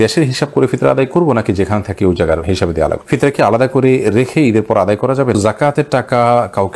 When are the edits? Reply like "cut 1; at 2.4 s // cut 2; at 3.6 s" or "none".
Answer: cut 1; at 3.0 s // cut 2; at 5.4 s